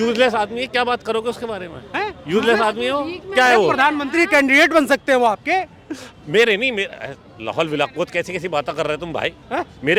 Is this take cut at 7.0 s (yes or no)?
no